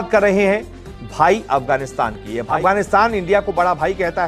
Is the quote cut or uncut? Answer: cut